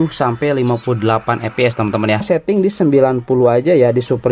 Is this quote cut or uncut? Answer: cut